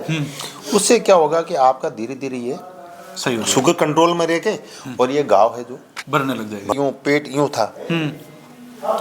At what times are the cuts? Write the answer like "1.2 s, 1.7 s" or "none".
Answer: 6.7 s